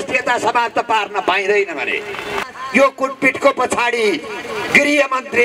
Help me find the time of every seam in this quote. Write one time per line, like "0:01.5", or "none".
0:02.4